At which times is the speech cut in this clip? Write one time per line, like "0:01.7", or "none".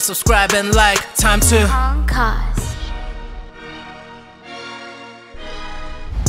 none